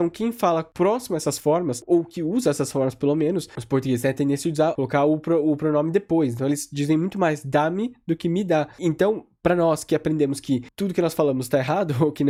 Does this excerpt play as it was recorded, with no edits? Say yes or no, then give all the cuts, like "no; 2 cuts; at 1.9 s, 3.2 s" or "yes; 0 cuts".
yes; 0 cuts